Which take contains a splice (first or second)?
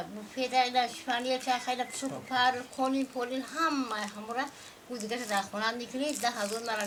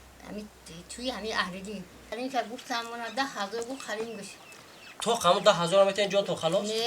second